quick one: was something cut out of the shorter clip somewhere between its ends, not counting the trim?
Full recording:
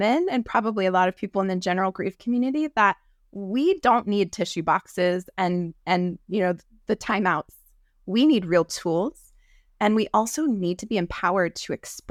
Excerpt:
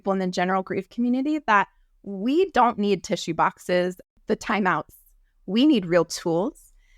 yes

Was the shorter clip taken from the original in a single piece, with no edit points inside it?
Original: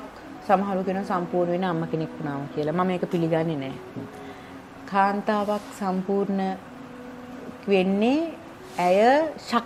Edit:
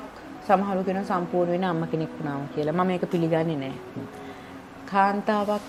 yes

